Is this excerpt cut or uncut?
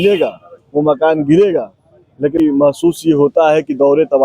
cut